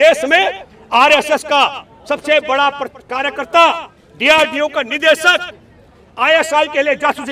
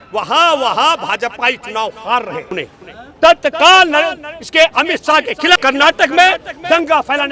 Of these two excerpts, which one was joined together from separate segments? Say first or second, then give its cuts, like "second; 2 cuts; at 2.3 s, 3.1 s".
second; 2 cuts; at 2.5 s, 5.6 s